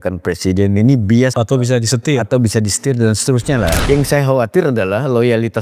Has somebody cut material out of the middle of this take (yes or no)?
yes